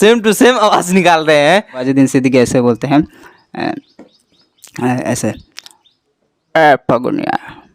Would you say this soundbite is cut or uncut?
cut